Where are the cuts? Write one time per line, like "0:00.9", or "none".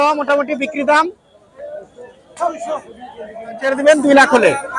0:03.7